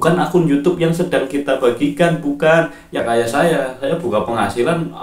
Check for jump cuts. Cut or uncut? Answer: cut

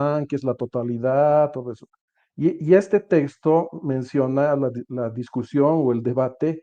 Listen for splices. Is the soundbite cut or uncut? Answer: uncut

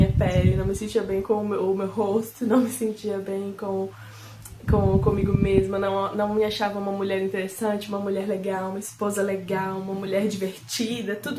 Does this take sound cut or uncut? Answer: uncut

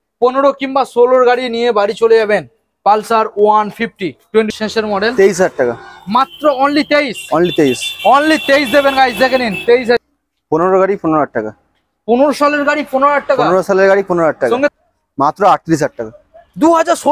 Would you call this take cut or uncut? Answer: cut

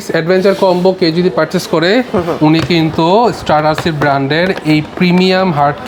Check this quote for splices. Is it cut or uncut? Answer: uncut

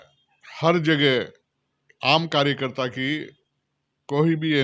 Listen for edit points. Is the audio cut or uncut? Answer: uncut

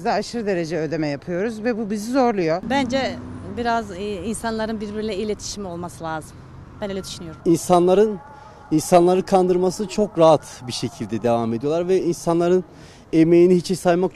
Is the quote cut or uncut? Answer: cut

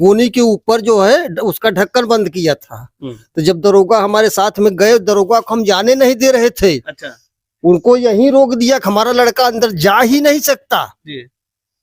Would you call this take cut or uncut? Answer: uncut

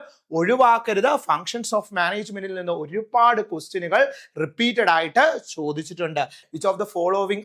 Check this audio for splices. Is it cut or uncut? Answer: cut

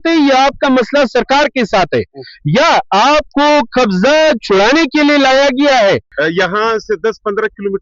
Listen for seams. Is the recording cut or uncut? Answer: cut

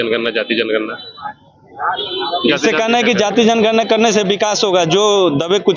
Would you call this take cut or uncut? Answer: uncut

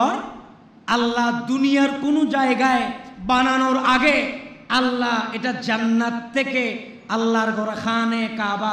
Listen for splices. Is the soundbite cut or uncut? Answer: uncut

